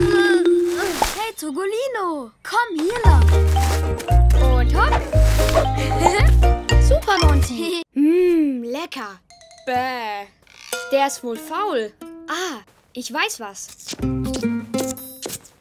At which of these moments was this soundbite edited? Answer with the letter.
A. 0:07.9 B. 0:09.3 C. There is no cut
A